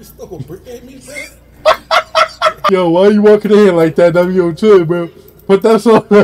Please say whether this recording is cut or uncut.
cut